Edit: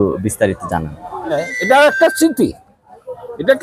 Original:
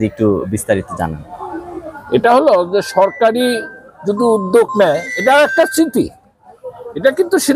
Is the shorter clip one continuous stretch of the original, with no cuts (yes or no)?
no